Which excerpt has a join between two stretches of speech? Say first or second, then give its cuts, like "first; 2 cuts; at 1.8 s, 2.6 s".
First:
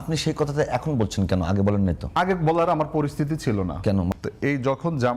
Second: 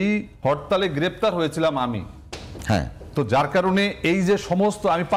first; 1 cut; at 4.1 s